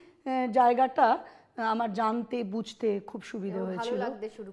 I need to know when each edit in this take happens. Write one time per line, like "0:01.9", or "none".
none